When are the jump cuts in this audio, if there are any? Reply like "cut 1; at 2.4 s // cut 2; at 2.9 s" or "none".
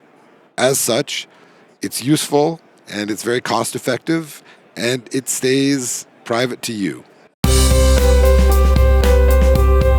cut 1; at 7.3 s